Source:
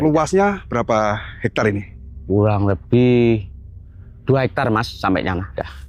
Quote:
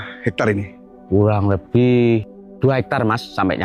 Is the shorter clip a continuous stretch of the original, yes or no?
no